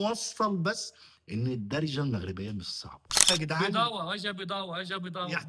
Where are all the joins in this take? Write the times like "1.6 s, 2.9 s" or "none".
3.3 s